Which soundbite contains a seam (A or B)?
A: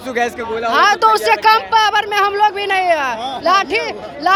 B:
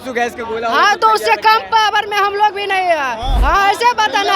B